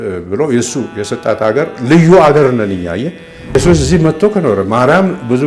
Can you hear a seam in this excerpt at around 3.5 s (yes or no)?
yes